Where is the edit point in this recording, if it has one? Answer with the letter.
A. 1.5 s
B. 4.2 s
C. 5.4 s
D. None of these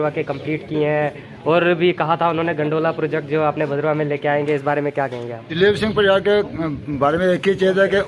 C